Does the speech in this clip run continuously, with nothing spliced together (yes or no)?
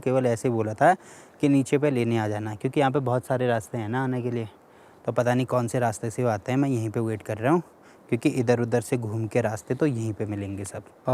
yes